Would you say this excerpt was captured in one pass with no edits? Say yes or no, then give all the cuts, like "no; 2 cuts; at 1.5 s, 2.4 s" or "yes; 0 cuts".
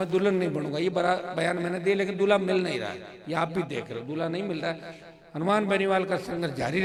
yes; 0 cuts